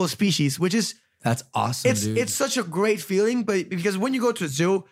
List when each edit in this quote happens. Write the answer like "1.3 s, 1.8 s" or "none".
none

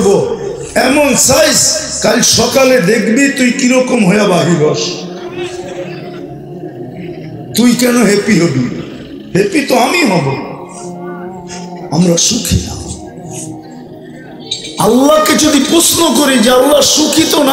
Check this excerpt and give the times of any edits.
4.9 s, 7.5 s

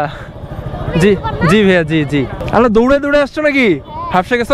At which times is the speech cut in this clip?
2.4 s

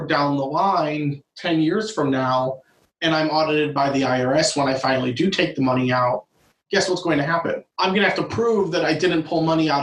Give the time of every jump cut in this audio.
7.7 s

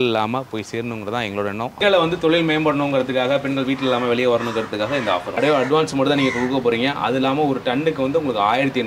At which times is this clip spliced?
1.8 s, 5.3 s

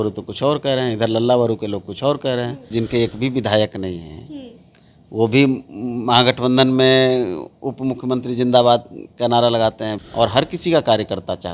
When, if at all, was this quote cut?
2.7 s, 9.9 s

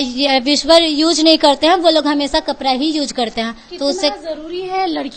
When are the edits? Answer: none

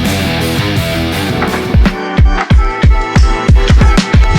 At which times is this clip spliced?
1.4 s

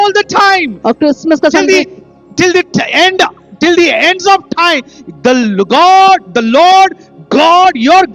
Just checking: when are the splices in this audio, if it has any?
none

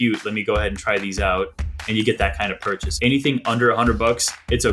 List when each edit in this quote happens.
2.9 s

